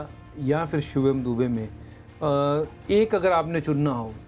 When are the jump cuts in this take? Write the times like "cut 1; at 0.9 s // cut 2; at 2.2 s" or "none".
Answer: none